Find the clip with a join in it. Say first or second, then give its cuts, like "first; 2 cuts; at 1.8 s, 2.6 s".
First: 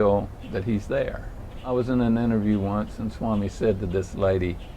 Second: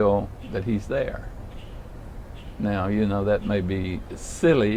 first; 1 cut; at 1.7 s